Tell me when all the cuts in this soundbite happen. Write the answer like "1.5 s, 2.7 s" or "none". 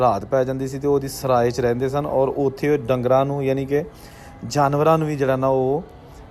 none

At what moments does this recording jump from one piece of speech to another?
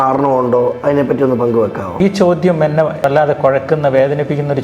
2.0 s, 3.0 s

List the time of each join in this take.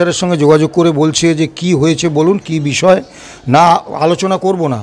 none

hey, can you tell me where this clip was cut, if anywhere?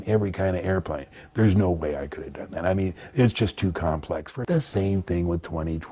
4.3 s

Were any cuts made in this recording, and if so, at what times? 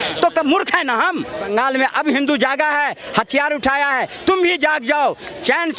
1.5 s

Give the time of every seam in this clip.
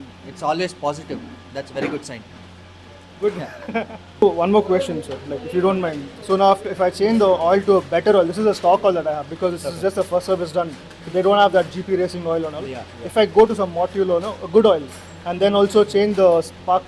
none

